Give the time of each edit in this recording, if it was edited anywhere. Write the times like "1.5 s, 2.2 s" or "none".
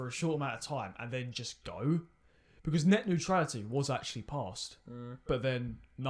none